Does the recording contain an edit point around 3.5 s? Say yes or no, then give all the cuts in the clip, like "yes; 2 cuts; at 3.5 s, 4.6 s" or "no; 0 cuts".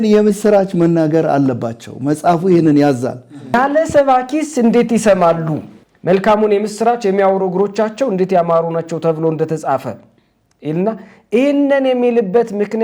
yes; 1 cut; at 3.5 s